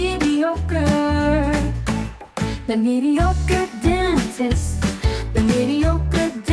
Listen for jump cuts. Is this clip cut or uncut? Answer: uncut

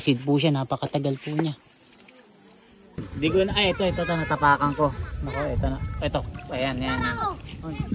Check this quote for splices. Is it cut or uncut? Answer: cut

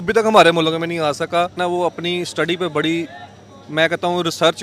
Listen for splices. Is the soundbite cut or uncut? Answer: cut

